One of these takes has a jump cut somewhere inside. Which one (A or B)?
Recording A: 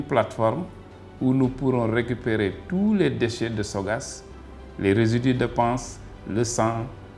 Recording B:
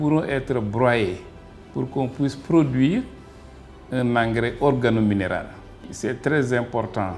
B